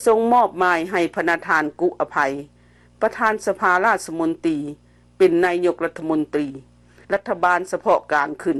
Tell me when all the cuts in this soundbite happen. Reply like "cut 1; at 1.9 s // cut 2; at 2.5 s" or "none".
none

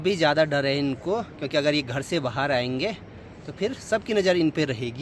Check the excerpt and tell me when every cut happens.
none

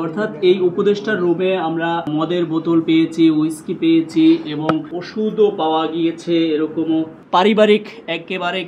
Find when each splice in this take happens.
cut 1; at 2.1 s // cut 2; at 5.0 s // cut 3; at 7.2 s

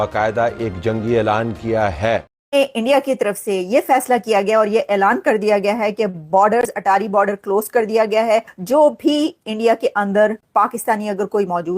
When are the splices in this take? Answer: cut 1; at 2.3 s

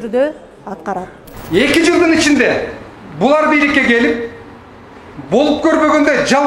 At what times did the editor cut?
cut 1; at 1.2 s

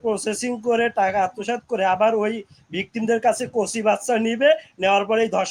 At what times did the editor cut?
none

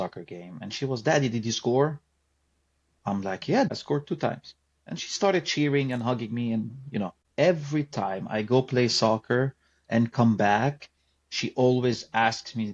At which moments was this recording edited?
cut 1; at 3.7 s // cut 2; at 7.2 s

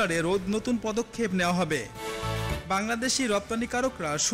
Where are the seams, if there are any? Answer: none

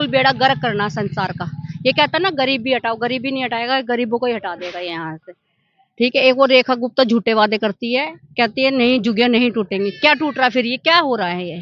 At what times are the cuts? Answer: none

